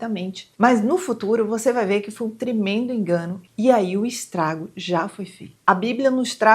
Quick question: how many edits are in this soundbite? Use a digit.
1